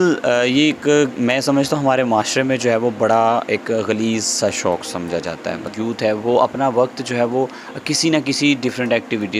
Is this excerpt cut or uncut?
cut